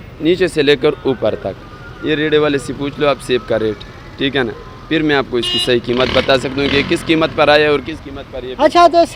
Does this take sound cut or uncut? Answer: uncut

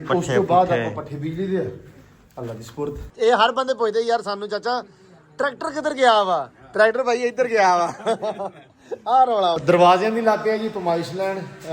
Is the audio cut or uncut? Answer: cut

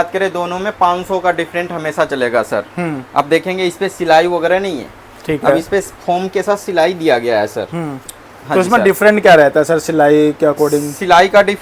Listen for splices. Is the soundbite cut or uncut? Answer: uncut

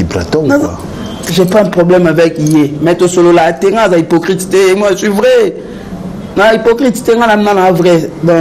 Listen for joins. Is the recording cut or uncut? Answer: uncut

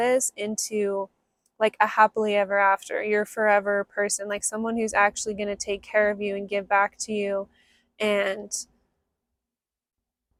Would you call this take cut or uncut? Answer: uncut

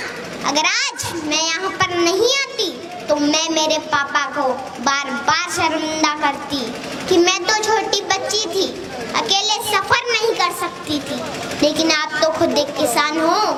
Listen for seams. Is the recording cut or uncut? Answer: uncut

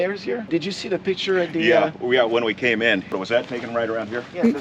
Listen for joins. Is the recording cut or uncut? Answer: cut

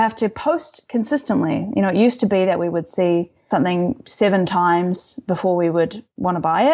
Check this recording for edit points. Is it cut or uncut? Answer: cut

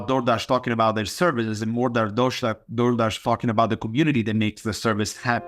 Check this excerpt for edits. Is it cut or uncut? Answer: uncut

